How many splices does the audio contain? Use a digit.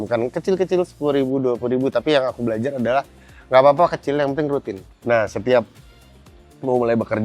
1